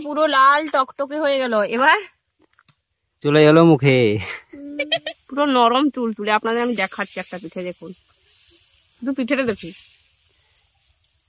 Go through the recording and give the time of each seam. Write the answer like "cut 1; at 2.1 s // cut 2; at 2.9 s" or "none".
cut 1; at 5.2 s